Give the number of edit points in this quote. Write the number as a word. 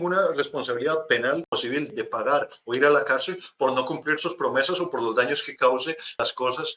zero